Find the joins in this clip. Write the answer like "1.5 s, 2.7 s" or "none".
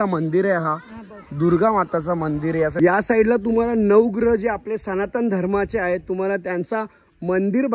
2.8 s